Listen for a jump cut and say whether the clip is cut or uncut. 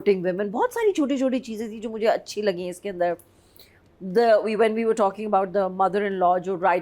uncut